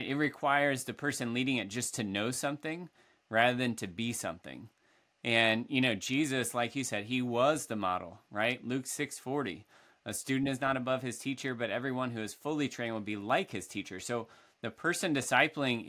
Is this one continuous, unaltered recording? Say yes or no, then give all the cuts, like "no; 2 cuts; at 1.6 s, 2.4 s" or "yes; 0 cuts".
yes; 0 cuts